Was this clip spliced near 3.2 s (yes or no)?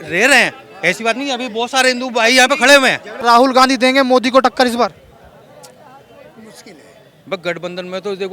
yes